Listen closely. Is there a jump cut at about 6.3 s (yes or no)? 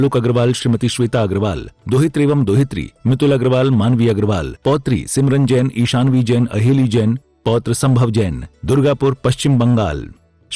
no